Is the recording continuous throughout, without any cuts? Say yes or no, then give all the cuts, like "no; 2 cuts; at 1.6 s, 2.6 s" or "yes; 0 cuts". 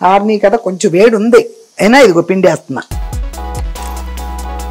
no; 1 cut; at 3.0 s